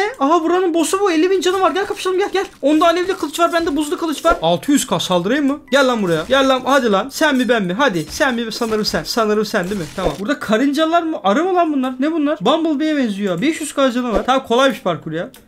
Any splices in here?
yes; 3 cuts; at 4.4 s, 10.2 s, 14.2 s

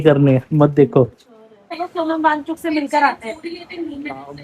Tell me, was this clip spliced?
yes; 1 cut; at 1.6 s

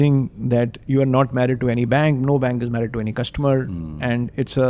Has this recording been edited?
no; 0 cuts

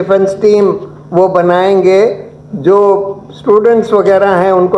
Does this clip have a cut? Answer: no; 0 cuts

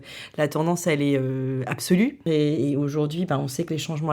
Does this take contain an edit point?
yes; 1 cut; at 2.3 s

